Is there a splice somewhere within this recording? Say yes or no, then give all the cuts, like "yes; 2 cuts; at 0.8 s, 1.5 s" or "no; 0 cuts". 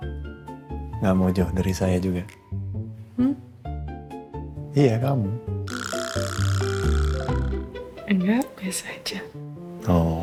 no; 0 cuts